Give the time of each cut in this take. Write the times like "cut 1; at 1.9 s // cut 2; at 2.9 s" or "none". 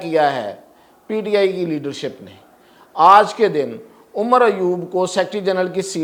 none